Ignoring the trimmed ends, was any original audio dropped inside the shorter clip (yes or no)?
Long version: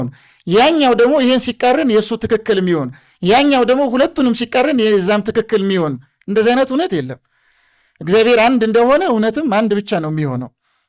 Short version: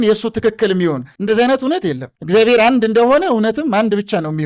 yes